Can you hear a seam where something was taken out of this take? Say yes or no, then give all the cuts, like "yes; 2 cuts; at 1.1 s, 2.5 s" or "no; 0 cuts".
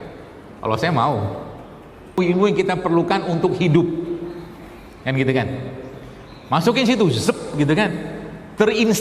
yes; 1 cut; at 2.2 s